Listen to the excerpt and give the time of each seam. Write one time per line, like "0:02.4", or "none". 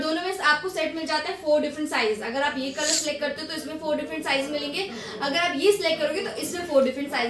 none